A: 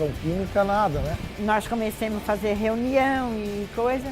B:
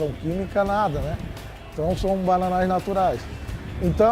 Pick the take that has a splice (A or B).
A